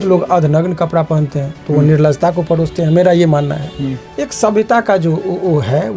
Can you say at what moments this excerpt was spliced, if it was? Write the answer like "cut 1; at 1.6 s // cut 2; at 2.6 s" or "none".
none